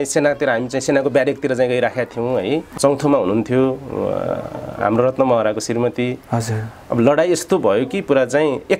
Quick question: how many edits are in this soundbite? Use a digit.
1